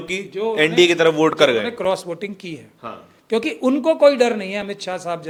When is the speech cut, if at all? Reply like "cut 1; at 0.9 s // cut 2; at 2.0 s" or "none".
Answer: none